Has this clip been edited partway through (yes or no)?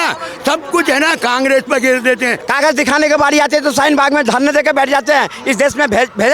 yes